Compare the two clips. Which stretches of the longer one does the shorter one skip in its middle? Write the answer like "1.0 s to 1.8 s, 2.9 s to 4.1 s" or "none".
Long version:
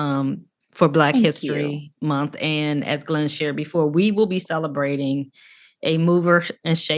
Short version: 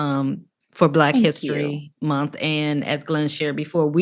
none